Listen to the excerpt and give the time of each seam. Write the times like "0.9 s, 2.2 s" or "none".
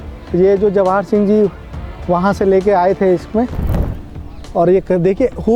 3.9 s

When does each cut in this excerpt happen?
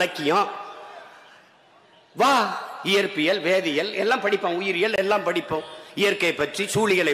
none

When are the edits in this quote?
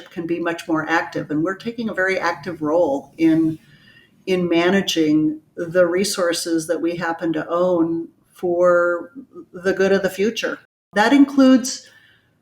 10.9 s

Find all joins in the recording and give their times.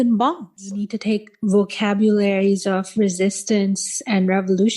0.9 s

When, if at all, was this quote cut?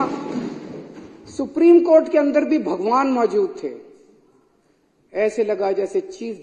none

